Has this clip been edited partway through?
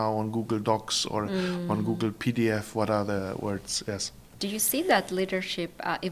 no; 0 cuts

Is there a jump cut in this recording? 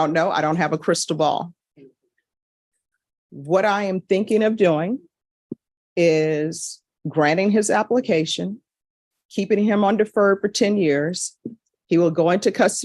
no; 0 cuts

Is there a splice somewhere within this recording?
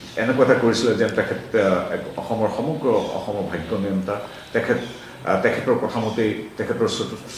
no; 0 cuts

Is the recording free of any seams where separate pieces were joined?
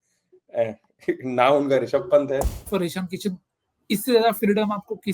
no; 1 cut; at 2.5 s

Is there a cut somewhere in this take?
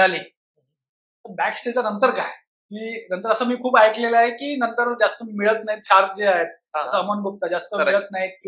no; 0 cuts

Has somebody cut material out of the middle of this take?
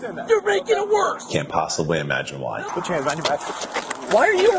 yes; 2 cuts; at 1.2 s, 2.6 s

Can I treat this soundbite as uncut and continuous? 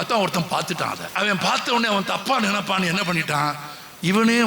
no; 1 cut; at 1.0 s

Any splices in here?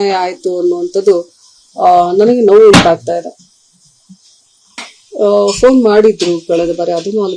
yes; 1 cut; at 4.8 s

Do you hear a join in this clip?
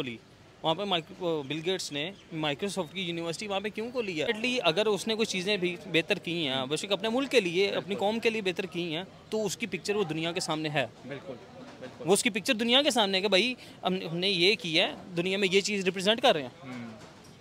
yes; 1 cut; at 4.3 s

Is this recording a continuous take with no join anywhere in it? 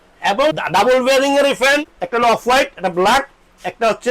no; 1 cut; at 1.8 s

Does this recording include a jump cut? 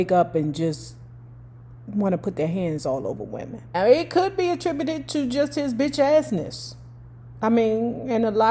no; 0 cuts

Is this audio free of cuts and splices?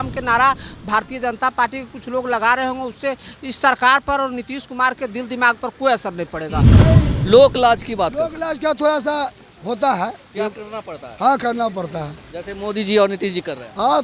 no; 1 cut; at 6.7 s

